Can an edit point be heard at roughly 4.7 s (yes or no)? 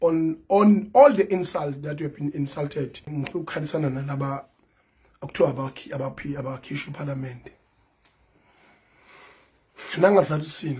no